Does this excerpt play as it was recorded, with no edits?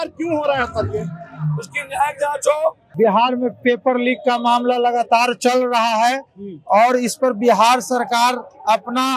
no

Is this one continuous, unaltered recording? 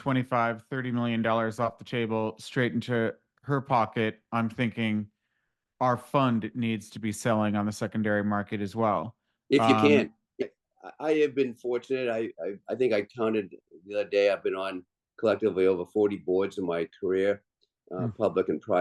no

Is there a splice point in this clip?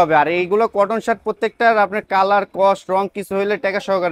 no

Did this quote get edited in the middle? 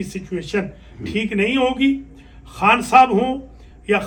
no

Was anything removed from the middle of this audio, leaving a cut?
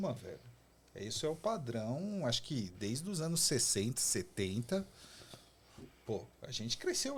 no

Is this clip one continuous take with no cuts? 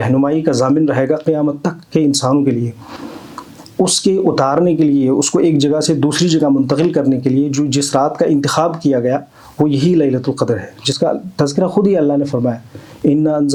yes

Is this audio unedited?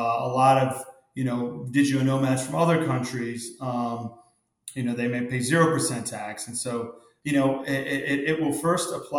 no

